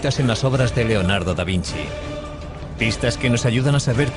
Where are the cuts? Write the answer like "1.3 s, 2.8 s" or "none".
1.7 s